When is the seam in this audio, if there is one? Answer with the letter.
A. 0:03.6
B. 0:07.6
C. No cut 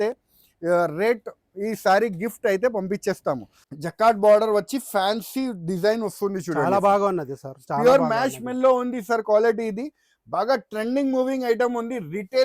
A